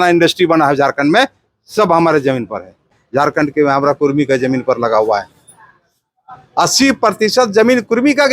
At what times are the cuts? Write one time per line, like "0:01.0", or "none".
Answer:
0:03.0

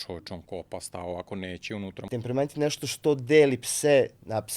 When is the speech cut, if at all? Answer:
0:02.0

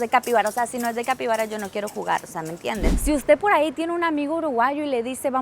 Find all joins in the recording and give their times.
0:03.0

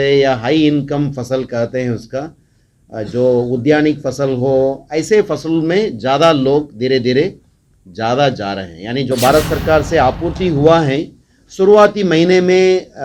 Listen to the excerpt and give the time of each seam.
0:09.1

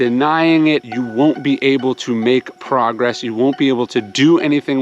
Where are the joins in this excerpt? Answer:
0:00.9

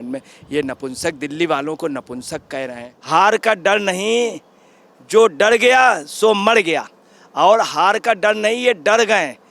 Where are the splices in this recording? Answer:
0:02.9

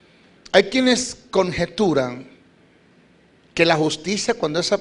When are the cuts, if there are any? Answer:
0:03.6

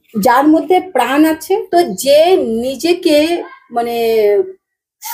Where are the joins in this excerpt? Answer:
0:01.7

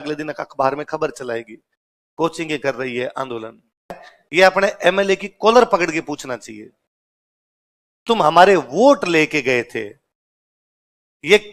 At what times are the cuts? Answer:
0:04.0

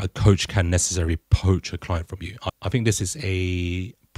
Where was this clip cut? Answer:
0:02.5

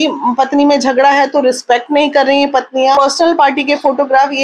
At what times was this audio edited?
0:03.0

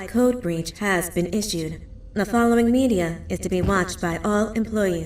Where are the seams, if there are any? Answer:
none

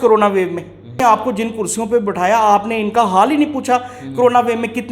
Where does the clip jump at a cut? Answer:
0:01.0

